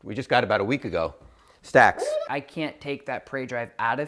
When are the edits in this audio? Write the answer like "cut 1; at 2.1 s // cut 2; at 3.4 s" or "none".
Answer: cut 1; at 2.3 s